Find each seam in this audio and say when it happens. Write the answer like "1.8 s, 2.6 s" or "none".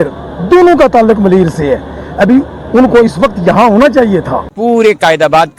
4.5 s